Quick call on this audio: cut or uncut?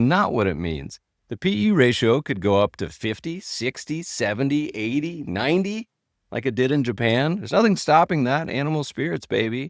uncut